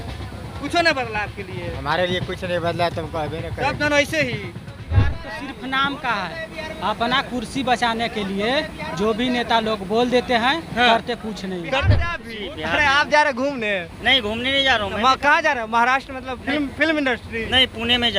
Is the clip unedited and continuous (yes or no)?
no